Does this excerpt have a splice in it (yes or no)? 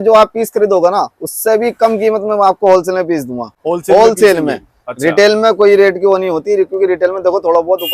no